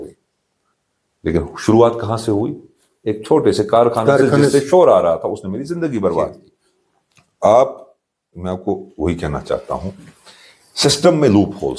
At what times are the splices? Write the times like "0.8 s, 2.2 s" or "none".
6.2 s